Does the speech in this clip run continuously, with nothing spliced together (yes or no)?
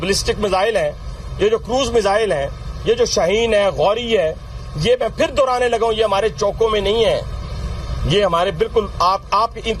yes